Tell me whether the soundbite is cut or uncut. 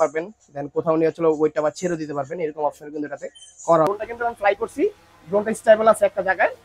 cut